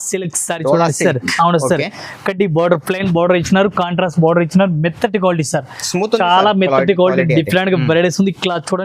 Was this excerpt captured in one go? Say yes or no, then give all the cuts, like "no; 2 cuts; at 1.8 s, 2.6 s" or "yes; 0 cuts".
yes; 0 cuts